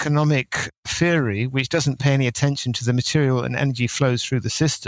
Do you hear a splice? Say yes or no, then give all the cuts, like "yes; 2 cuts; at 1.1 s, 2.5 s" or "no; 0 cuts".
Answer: no; 0 cuts